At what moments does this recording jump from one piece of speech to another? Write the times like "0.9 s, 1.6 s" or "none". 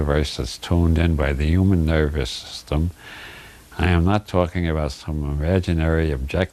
4.5 s